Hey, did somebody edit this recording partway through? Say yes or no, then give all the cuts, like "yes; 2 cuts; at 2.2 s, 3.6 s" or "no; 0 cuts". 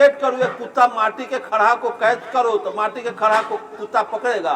no; 0 cuts